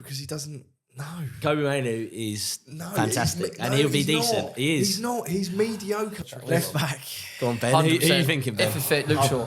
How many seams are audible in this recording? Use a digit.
1